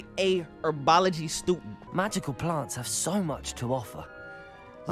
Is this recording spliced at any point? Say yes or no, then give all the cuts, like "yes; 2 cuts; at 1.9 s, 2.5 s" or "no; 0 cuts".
yes; 1 cut; at 1.7 s